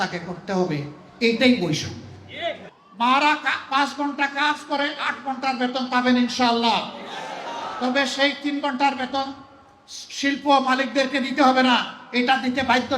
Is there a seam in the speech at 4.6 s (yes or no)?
no